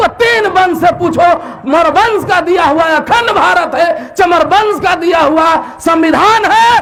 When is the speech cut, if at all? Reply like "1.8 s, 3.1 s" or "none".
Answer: none